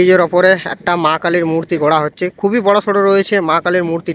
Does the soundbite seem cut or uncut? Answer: uncut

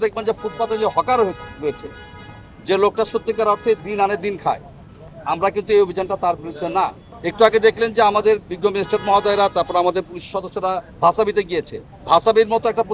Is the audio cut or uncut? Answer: uncut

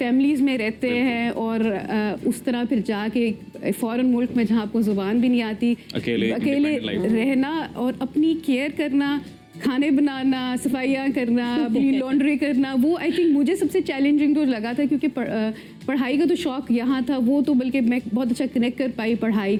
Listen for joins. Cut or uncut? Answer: uncut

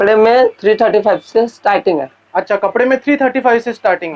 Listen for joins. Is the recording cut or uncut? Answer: uncut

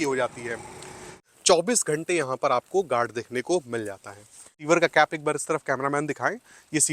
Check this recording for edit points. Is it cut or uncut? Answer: cut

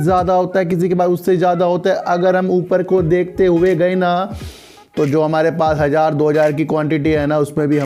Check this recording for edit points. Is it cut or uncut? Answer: uncut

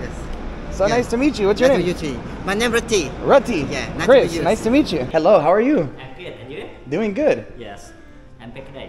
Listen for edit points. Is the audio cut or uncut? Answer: cut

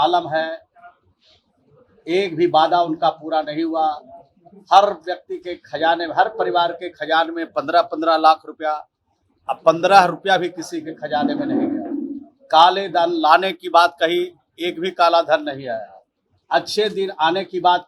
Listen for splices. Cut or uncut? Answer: uncut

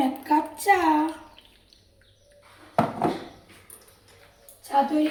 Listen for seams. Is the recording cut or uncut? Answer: uncut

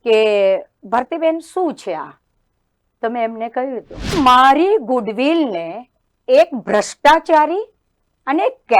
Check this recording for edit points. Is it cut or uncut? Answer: cut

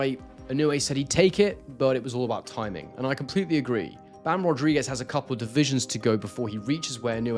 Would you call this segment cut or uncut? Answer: uncut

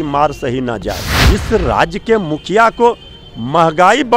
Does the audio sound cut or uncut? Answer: cut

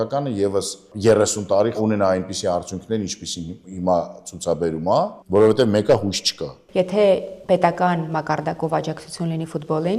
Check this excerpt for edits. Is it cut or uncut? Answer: cut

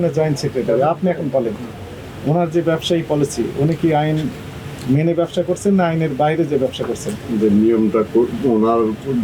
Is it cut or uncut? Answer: uncut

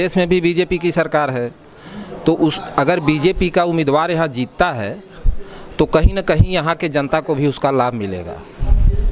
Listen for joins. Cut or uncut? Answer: uncut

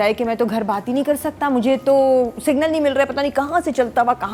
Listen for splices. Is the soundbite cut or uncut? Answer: uncut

